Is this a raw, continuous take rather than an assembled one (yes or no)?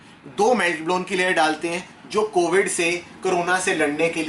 yes